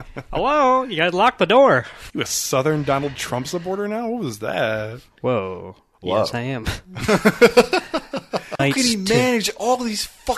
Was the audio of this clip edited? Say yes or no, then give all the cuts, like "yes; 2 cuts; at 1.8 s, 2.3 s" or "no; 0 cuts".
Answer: yes; 2 cuts; at 2.0 s, 8.6 s